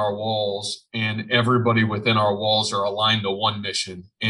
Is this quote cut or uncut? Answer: uncut